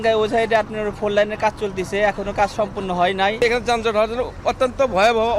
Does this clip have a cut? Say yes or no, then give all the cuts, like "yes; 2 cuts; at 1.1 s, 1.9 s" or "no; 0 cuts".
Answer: yes; 1 cut; at 3.4 s